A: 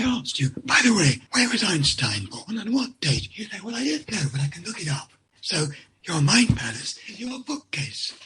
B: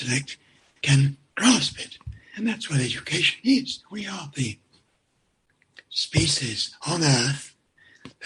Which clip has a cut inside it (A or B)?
A